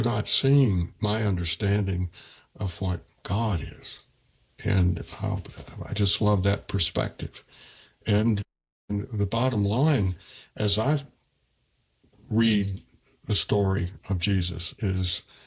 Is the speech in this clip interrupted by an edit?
no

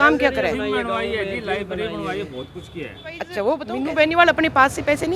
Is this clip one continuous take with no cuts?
no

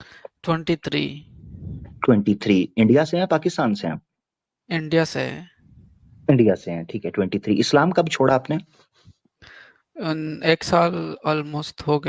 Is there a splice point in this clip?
no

